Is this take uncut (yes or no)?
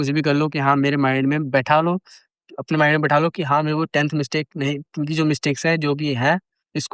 yes